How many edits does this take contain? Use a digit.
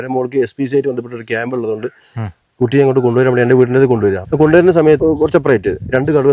2